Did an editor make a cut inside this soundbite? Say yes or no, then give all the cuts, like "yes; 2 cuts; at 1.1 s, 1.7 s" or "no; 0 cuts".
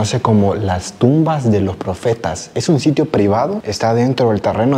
no; 0 cuts